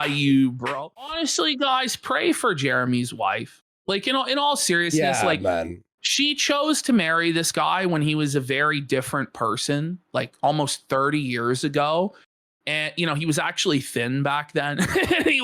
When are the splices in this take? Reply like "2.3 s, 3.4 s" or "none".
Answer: 1.1 s